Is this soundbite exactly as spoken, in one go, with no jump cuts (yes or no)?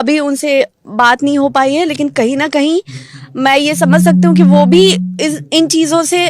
yes